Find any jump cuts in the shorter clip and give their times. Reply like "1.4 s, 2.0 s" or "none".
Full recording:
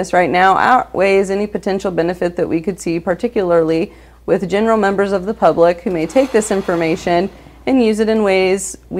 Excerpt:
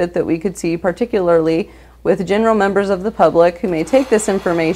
none